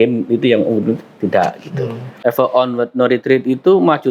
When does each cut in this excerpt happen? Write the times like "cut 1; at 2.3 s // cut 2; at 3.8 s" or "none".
cut 1; at 2.2 s

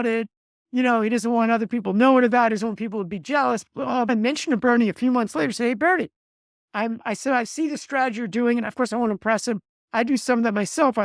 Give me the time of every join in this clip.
cut 1; at 4.1 s

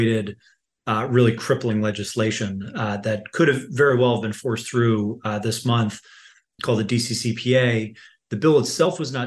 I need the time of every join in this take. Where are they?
none

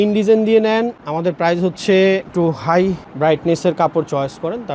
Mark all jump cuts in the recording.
cut 1; at 2.3 s

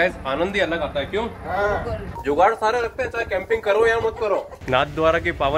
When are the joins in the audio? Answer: cut 1; at 2.1 s // cut 2; at 4.5 s

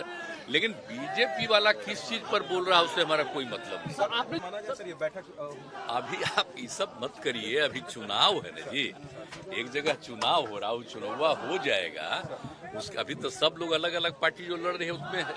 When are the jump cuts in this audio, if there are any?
cut 1; at 4.4 s

